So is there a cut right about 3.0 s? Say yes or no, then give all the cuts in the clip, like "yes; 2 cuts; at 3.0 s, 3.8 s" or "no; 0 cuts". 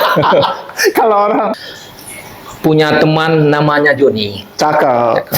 no; 1 cut; at 1.5 s